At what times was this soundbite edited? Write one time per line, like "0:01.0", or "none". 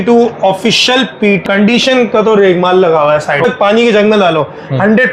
0:01.4
0:03.5